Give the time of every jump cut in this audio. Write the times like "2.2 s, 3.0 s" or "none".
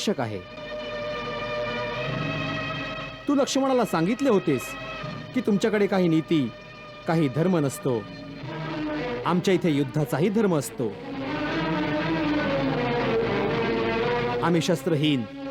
none